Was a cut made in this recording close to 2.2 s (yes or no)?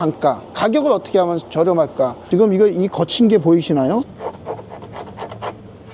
yes